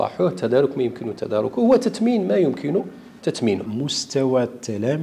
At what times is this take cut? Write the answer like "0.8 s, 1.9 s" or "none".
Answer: 3.7 s